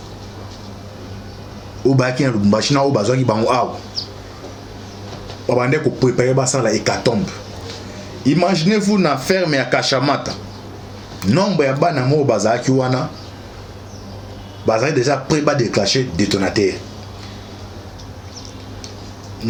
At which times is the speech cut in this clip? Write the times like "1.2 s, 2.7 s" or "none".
none